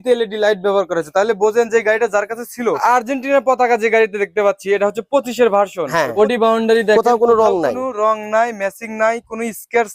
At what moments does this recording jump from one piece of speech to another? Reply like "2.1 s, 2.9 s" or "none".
2.8 s, 6.1 s